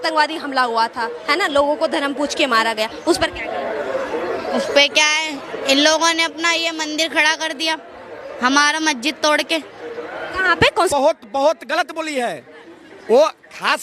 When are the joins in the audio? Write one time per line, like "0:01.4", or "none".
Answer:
0:10.9

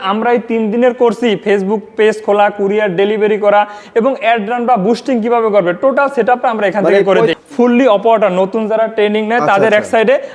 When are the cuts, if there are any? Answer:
0:07.4

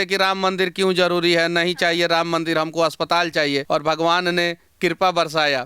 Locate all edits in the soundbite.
0:03.6

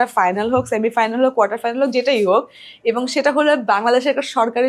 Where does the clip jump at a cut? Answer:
none

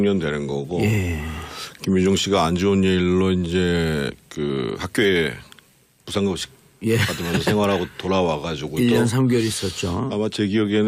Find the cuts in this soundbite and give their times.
0:02.1

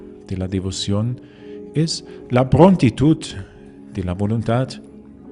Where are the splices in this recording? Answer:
none

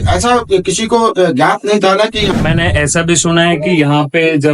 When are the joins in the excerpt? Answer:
0:02.3

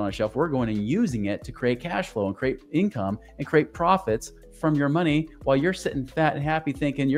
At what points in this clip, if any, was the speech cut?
none

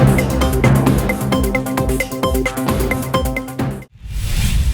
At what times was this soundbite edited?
0:03.8

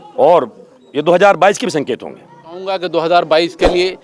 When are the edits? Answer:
0:02.7

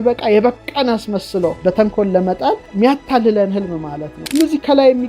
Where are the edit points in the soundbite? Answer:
0:01.6
0:02.7
0:04.1

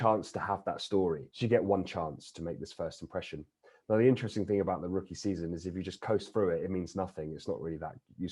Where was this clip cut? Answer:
0:01.3

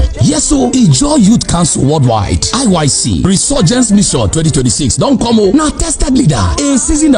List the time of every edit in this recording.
none

